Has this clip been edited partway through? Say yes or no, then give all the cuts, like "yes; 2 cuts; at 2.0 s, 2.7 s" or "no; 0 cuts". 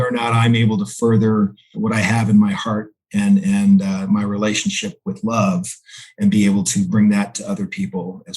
yes; 2 cuts; at 1.7 s, 7.4 s